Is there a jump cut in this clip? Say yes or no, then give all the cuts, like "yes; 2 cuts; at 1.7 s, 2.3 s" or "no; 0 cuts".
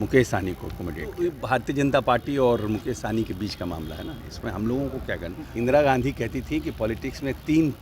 yes; 2 cuts; at 1.1 s, 5.4 s